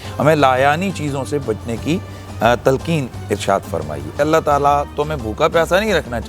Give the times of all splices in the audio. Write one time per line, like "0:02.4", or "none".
0:04.1